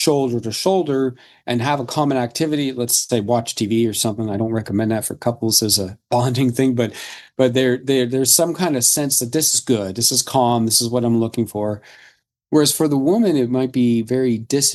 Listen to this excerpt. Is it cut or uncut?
uncut